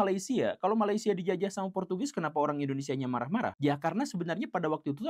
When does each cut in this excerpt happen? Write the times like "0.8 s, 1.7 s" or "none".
3.5 s

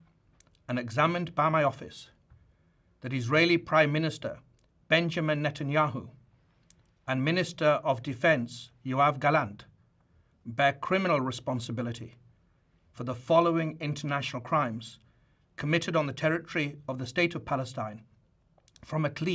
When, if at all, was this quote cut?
none

